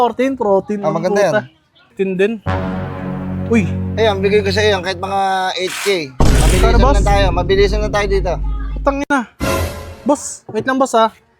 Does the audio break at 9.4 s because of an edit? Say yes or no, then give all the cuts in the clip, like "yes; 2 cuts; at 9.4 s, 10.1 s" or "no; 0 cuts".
no; 1 cut; at 1.9 s